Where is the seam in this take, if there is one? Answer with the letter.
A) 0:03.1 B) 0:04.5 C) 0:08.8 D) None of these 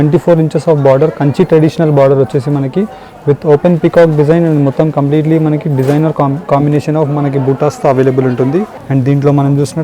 C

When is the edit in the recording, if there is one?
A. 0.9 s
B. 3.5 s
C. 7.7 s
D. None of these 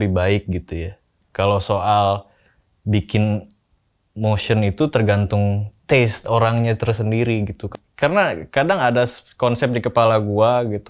C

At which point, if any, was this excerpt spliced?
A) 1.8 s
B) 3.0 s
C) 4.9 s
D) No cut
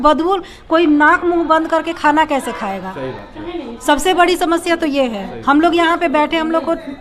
D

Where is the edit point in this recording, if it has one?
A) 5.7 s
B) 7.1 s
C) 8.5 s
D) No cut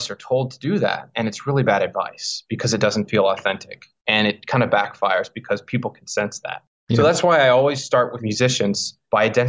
C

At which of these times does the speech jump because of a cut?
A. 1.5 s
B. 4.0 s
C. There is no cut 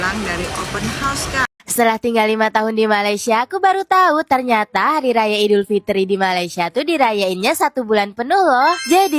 A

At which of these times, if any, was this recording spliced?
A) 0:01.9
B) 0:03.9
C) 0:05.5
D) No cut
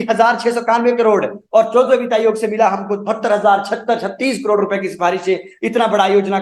D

